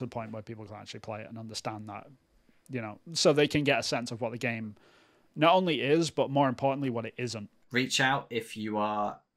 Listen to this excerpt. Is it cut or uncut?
cut